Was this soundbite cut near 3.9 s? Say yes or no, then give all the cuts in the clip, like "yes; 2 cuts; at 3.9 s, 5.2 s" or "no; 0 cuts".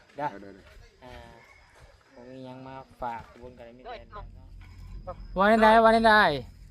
yes; 1 cut; at 3.9 s